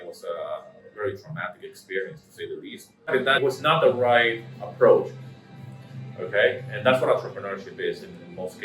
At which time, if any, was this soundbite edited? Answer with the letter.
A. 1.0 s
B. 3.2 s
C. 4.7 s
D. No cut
B